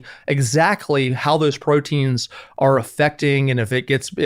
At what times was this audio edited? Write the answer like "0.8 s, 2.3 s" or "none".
none